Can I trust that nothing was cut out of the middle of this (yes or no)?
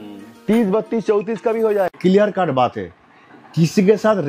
no